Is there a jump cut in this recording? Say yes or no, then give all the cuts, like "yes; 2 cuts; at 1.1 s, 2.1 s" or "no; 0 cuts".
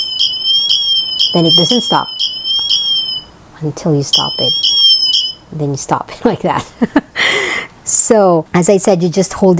no; 0 cuts